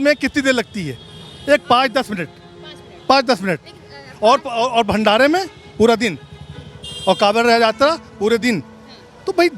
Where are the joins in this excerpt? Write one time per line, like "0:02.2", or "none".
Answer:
none